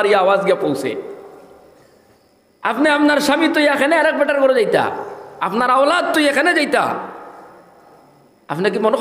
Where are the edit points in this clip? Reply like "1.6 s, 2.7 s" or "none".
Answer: none